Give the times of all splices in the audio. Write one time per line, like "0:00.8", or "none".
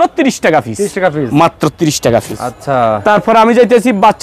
none